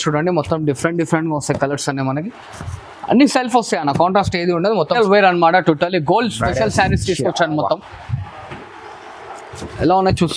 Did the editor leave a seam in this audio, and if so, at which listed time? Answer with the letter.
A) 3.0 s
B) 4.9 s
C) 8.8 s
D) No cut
B